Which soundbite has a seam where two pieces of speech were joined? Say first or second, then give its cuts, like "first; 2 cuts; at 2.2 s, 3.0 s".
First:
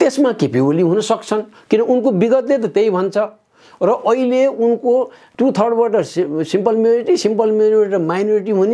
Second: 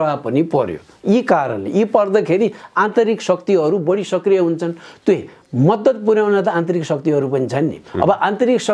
first; 1 cut; at 5.2 s